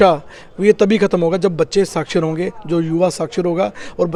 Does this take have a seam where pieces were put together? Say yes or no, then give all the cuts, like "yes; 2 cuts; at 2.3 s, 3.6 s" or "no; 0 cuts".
no; 0 cuts